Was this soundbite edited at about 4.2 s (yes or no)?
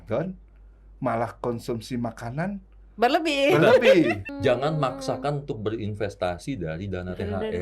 yes